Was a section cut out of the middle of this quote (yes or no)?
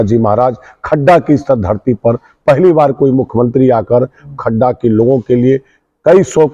no